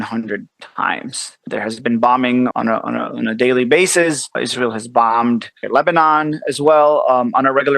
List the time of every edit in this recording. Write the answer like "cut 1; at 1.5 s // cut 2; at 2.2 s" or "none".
cut 1; at 1.5 s // cut 2; at 2.5 s // cut 3; at 4.5 s // cut 4; at 5.6 s